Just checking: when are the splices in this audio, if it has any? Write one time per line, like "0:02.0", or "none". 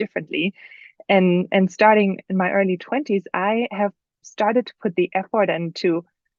none